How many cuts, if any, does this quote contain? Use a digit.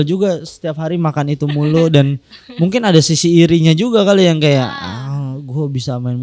0